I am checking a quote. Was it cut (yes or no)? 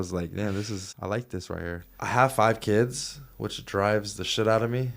yes